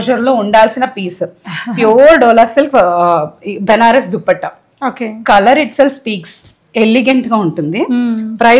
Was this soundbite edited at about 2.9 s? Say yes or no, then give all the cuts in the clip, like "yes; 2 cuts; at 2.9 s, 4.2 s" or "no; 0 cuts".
no; 0 cuts